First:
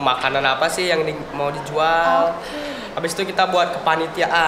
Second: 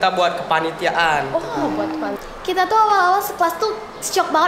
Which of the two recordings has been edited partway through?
second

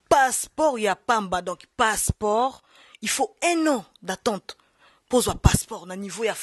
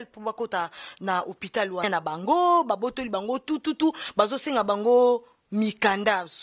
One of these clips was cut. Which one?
second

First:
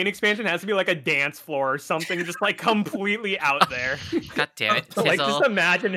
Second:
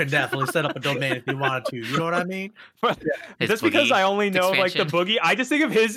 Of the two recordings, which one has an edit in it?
second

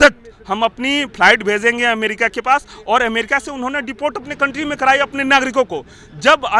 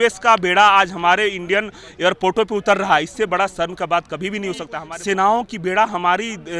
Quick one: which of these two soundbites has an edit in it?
second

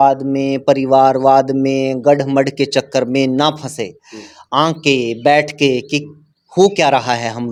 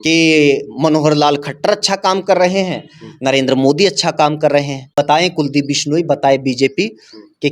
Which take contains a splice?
second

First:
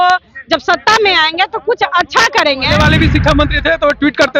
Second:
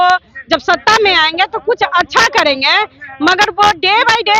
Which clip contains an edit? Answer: first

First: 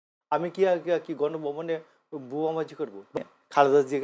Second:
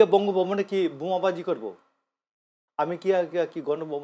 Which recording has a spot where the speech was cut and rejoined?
first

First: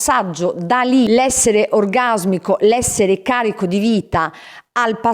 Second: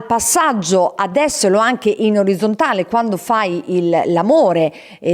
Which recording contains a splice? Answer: first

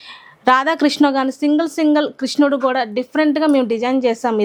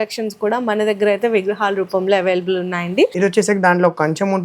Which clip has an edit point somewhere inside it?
second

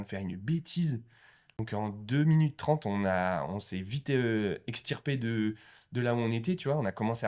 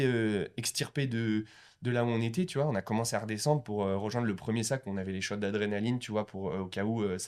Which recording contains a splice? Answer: first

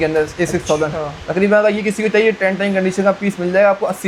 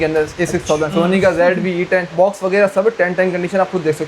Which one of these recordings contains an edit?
second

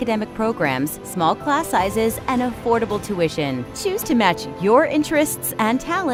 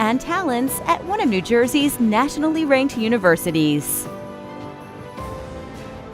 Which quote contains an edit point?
second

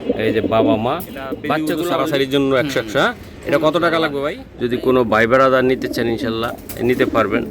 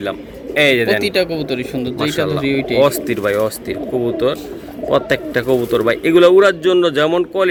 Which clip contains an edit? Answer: first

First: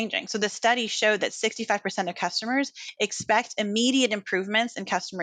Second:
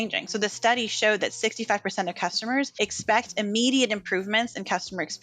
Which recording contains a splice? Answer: second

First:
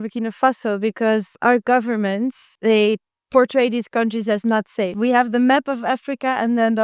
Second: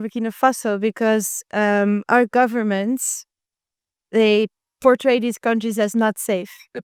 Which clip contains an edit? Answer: first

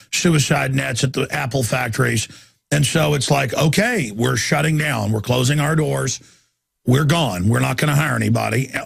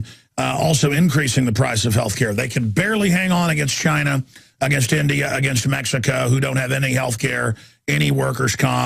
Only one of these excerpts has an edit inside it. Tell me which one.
second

